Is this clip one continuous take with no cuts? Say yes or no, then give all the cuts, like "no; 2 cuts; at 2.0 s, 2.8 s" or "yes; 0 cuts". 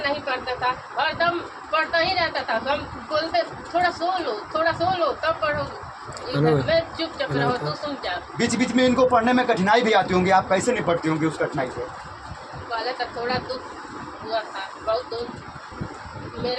yes; 0 cuts